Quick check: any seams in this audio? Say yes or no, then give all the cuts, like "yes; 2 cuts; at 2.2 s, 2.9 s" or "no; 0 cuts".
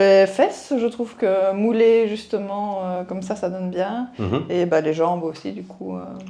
no; 0 cuts